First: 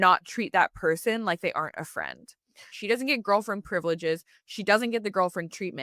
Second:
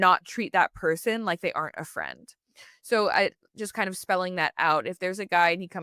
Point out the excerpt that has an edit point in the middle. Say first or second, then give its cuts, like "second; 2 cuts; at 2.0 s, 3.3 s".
first; 1 cut; at 2.7 s